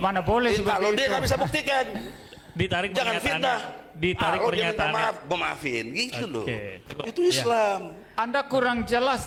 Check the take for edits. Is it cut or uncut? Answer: uncut